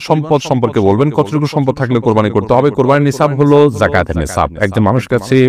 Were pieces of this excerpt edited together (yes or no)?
no